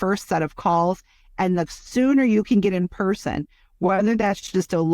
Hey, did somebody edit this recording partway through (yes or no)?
no